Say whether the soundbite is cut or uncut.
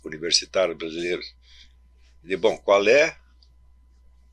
uncut